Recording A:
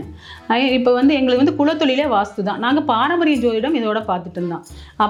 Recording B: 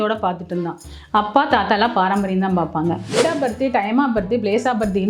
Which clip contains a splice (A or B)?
B